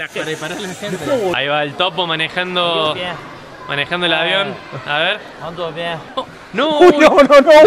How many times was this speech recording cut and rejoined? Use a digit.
2